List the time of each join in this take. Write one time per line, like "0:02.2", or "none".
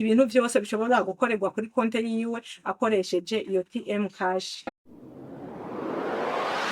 0:04.6